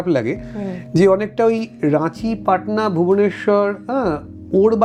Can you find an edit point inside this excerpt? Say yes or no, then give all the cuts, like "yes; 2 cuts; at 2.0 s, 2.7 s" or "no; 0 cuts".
no; 0 cuts